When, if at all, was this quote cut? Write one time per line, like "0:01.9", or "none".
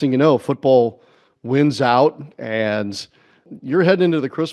0:03.5

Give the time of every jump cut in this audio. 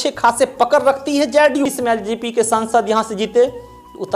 0:01.7

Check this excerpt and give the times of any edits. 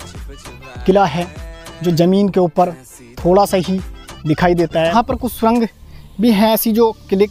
0:04.9

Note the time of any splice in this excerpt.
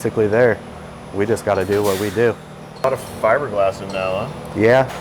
0:02.8

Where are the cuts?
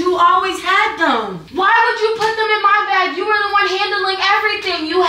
0:01.4

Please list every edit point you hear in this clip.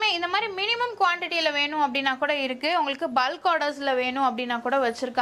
none

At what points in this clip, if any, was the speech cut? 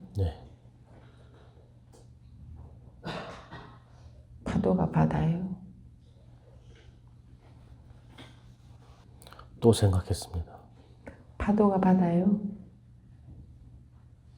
0:09.0

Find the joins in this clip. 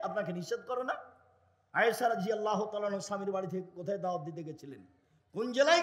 none

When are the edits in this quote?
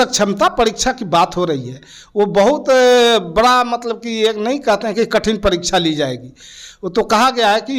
none

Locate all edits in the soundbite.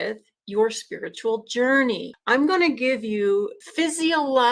0:02.1
0:03.6

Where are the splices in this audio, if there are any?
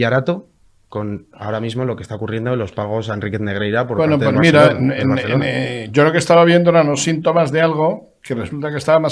none

